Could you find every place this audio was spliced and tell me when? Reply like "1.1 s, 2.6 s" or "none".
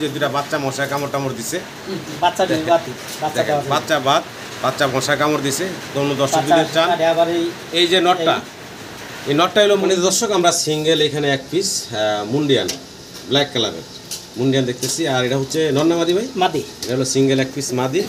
9.8 s